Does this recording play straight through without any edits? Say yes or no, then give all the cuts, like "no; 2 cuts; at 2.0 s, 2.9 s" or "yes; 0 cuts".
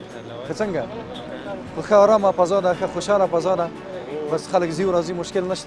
yes; 0 cuts